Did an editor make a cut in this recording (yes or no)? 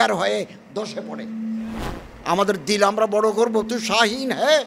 yes